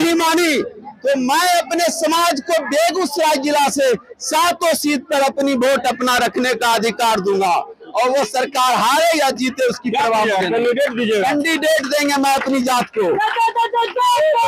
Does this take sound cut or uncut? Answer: uncut